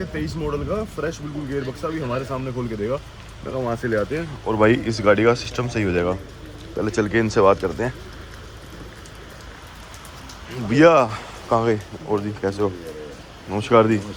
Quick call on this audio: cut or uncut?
uncut